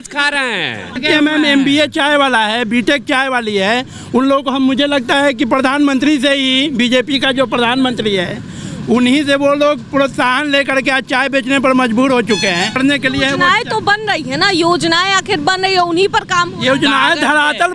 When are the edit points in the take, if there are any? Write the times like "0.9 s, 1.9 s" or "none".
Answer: 1.0 s, 12.7 s